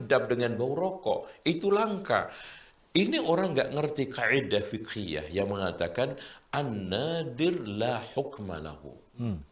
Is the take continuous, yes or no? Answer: yes